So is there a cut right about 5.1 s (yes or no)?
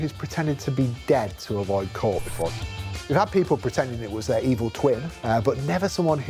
yes